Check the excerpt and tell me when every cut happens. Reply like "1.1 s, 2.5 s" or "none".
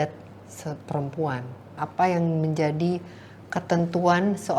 1.8 s